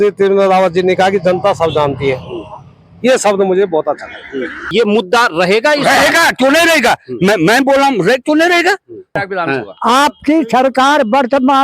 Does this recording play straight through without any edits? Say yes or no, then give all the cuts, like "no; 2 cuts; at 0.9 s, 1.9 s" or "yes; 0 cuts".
no; 2 cuts; at 4.7 s, 9.2 s